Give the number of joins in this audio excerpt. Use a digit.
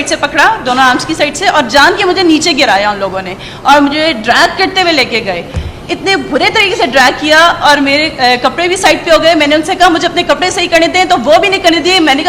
0